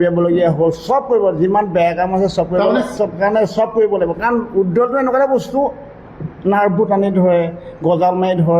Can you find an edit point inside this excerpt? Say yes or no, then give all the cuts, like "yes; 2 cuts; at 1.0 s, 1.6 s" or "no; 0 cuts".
yes; 1 cut; at 2.9 s